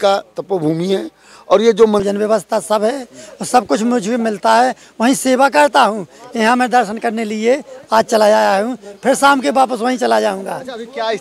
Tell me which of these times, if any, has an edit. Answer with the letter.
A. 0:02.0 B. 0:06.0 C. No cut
A